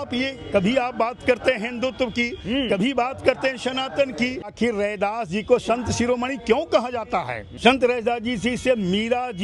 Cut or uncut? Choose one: cut